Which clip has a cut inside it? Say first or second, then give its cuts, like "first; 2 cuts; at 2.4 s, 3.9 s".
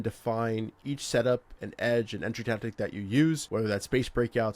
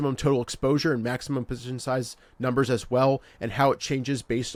first; 1 cut; at 3.4 s